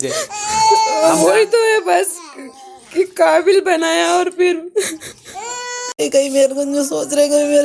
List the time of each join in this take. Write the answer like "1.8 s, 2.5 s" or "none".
6.0 s